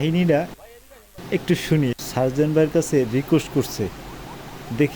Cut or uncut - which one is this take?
cut